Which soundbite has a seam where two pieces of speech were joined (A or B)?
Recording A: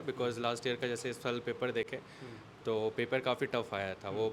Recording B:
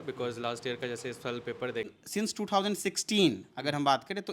B